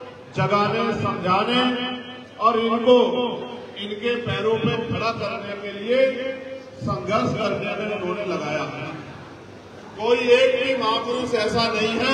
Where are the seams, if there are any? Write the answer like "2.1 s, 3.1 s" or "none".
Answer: 11.2 s